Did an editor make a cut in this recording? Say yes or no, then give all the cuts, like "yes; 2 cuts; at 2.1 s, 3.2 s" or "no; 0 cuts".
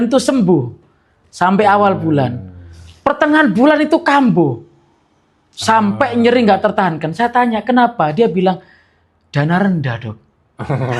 no; 0 cuts